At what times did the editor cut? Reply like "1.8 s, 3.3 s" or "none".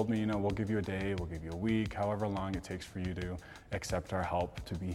none